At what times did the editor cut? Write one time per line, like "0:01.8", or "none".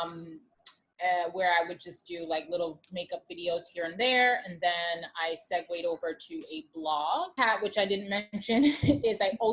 0:07.3